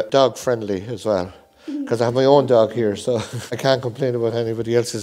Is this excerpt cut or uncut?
uncut